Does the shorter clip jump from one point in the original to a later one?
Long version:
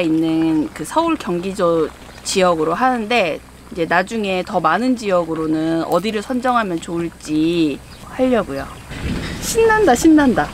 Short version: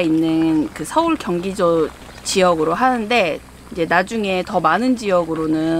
no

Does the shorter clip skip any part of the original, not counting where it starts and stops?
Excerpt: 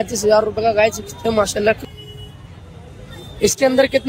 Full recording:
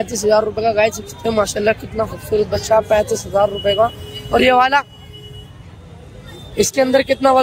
yes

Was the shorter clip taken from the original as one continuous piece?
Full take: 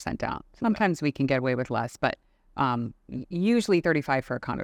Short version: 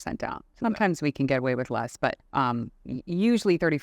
no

